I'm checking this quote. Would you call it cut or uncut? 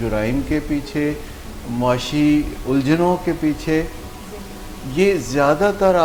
uncut